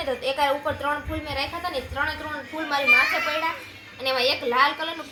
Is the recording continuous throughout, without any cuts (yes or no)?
yes